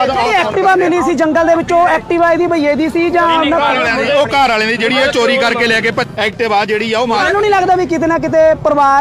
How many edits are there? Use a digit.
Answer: 1